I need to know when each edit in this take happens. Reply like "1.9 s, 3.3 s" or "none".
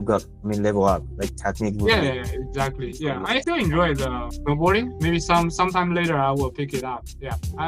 3.4 s, 4.3 s